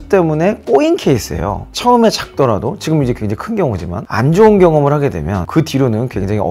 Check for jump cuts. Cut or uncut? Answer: cut